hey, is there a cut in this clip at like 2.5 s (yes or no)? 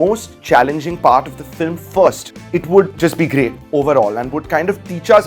no